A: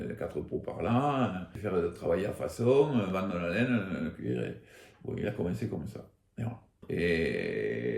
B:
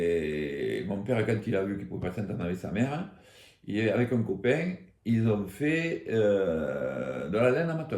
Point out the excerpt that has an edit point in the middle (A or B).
A